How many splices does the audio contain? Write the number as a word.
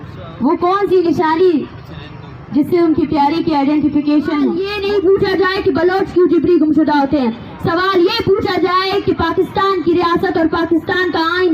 one